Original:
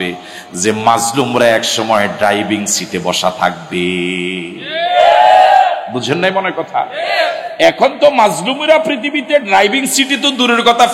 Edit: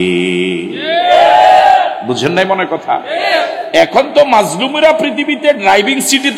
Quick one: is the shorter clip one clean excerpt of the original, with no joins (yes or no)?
yes